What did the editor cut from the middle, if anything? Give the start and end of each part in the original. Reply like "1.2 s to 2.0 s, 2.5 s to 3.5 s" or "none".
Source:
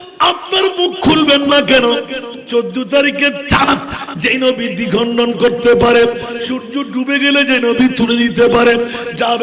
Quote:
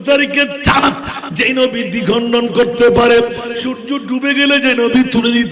none